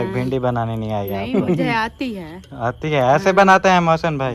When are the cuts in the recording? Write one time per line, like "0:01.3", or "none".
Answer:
none